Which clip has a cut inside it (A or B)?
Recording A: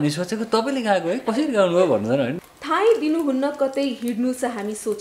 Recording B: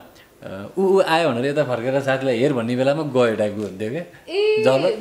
A